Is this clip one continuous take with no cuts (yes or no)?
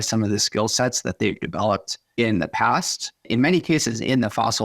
no